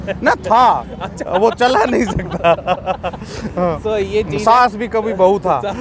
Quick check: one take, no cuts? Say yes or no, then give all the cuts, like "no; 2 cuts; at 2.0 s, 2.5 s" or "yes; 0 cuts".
yes; 0 cuts